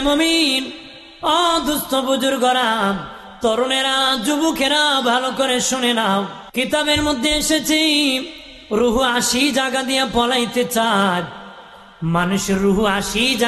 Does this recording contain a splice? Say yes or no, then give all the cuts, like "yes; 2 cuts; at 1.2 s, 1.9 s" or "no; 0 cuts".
yes; 1 cut; at 6.4 s